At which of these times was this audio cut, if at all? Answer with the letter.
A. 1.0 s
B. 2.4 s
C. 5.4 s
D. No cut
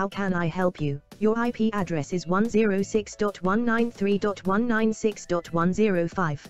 A